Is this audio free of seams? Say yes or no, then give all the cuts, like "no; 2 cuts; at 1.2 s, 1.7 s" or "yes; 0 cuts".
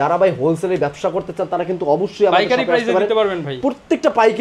yes; 0 cuts